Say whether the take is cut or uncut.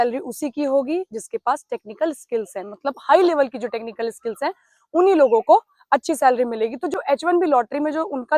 uncut